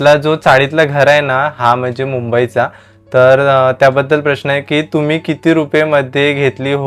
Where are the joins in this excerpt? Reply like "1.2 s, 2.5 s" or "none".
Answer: none

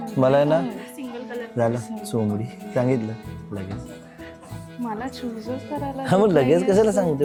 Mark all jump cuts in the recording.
none

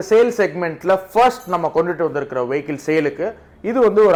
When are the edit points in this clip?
none

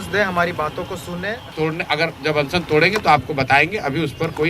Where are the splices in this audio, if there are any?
1.4 s

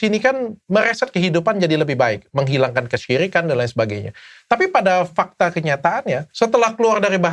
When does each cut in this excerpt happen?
6.3 s

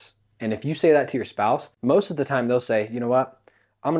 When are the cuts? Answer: 1.7 s

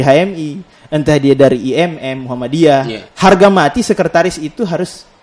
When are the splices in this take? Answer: 3.0 s

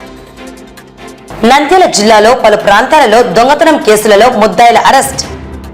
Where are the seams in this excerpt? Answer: 1.0 s

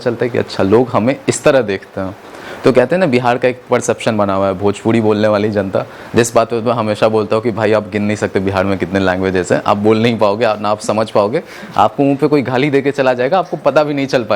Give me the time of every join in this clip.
none

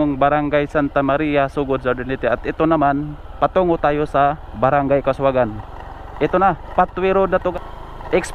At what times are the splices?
none

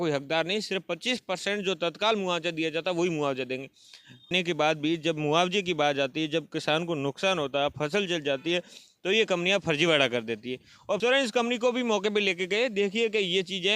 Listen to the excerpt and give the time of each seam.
4.3 s, 11.0 s

